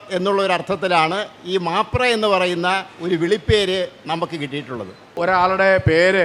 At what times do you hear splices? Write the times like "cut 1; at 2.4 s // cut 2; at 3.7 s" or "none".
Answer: cut 1; at 5.2 s